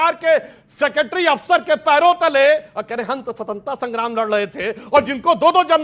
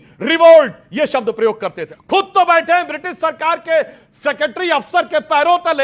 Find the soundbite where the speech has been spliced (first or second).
second